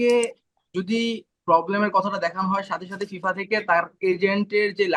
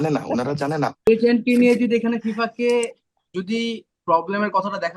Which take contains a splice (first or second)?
second